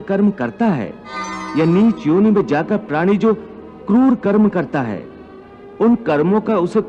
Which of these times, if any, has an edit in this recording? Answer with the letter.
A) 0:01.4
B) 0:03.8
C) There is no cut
A